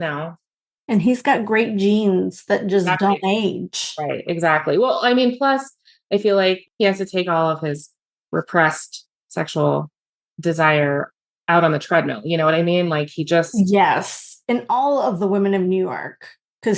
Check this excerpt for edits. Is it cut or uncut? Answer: uncut